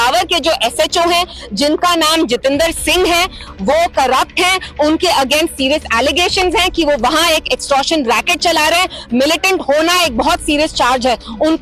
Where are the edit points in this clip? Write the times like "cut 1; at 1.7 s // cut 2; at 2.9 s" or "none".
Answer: none